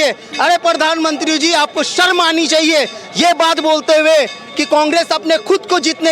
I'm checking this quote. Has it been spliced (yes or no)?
no